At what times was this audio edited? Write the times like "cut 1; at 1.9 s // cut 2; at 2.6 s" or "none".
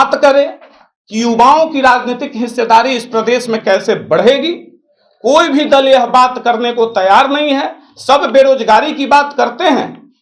none